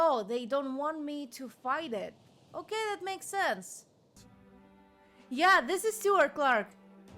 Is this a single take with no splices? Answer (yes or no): no